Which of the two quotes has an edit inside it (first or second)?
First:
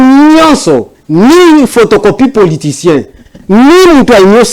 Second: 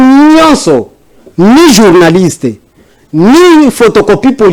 first